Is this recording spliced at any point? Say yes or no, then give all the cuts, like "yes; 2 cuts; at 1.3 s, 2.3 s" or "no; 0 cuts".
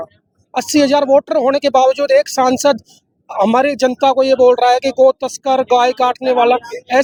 no; 0 cuts